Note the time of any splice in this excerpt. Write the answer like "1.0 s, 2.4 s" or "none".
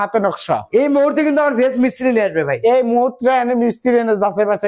none